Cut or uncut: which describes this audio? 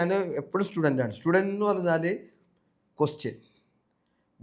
uncut